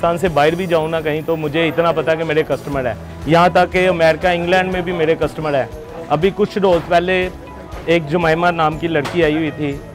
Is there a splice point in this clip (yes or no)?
no